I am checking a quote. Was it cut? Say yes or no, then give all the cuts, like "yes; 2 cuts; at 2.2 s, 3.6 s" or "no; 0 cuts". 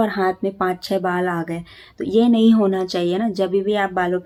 no; 0 cuts